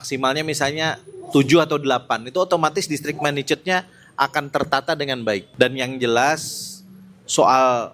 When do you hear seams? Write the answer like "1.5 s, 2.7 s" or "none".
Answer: 5.5 s